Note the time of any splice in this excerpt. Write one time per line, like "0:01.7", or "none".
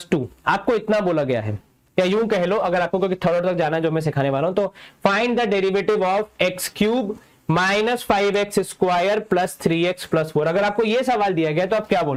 none